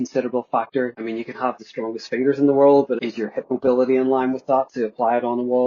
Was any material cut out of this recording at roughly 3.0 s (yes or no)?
yes